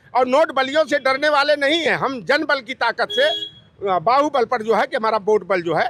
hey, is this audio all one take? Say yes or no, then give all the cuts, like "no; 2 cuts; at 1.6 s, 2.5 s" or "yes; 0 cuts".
yes; 0 cuts